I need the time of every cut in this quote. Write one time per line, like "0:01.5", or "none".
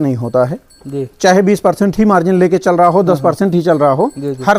none